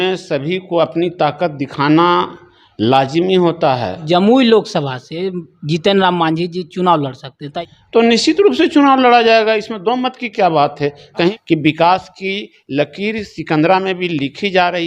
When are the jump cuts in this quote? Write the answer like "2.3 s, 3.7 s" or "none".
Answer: 4.0 s, 7.5 s, 11.3 s